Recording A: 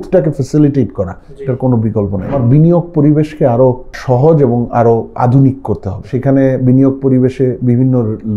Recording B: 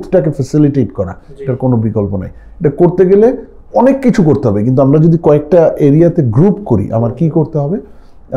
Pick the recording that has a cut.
A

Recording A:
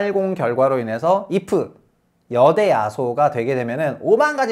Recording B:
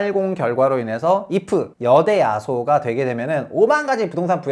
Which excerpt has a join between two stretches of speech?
B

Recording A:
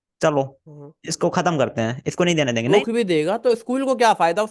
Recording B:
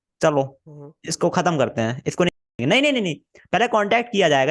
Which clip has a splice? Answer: A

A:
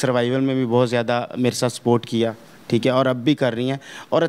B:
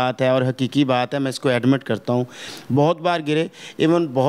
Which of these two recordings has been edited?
B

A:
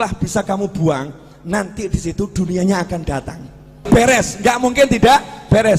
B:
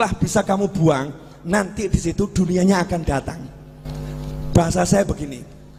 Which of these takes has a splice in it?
A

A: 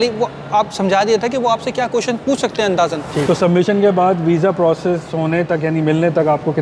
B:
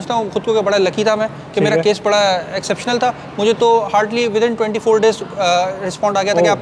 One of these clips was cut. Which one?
A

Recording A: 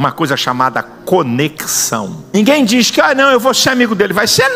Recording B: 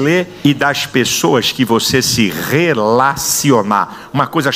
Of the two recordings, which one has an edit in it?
A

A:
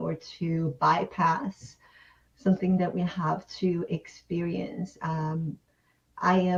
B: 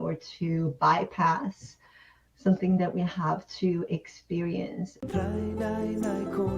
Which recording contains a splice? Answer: B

